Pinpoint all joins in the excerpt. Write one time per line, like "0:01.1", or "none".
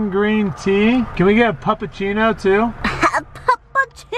0:01.1